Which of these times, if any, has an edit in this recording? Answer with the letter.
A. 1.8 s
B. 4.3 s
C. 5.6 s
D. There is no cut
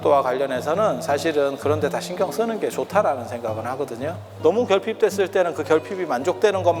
B